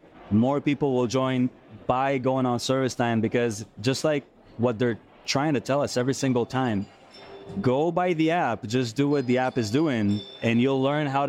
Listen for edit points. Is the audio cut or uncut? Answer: uncut